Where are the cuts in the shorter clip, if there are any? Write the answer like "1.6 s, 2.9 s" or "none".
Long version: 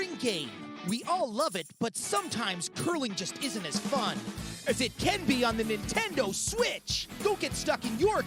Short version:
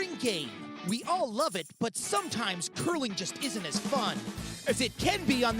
none